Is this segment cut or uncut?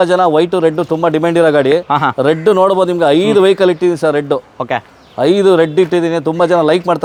uncut